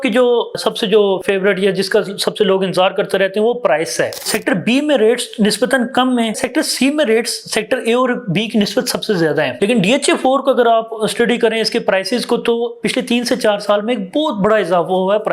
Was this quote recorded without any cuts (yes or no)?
no